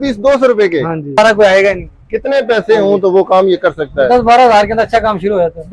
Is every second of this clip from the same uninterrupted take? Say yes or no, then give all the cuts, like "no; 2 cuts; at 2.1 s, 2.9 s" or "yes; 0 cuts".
no; 1 cut; at 1.2 s